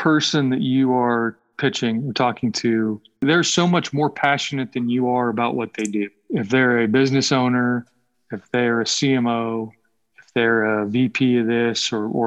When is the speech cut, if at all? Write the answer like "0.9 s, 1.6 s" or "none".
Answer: 1.4 s, 3.2 s, 6.2 s